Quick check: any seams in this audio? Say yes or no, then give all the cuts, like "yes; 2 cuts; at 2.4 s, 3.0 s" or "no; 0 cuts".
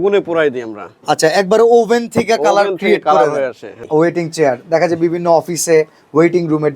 yes; 1 cut; at 3.8 s